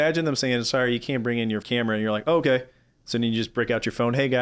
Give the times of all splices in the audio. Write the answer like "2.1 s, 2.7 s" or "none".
1.6 s